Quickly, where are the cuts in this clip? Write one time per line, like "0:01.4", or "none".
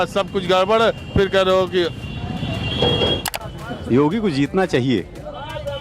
0:03.2

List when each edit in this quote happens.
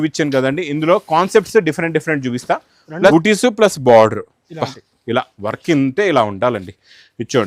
0:03.1

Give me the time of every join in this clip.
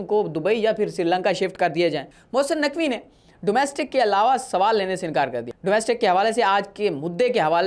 0:02.1
0:05.5

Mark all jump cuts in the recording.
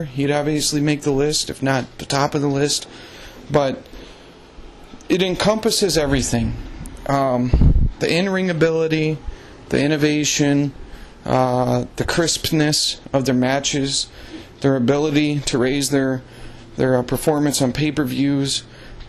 0:14.5

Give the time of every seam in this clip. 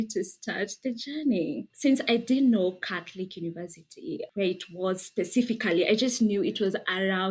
none

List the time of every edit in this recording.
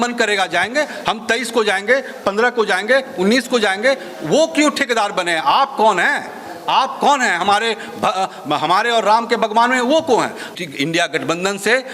0:10.5

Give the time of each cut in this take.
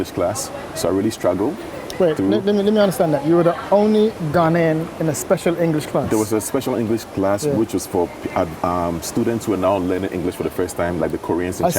none

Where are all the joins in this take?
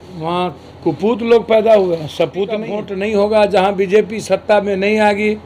0:02.8

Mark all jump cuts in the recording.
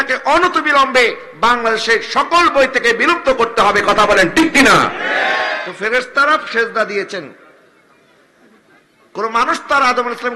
0:05.7

